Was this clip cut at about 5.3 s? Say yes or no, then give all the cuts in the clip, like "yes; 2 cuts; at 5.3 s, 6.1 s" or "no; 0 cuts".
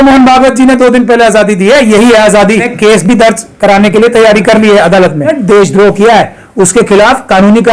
yes; 2 cuts; at 2.7 s, 5.3 s